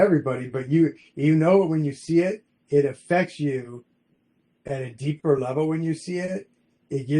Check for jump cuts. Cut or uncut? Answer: uncut